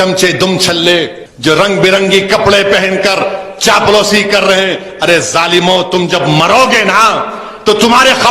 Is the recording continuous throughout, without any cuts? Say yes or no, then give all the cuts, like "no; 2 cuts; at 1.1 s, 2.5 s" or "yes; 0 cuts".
no; 1 cut; at 1.2 s